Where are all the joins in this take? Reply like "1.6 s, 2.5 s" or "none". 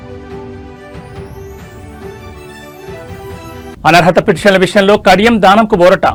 none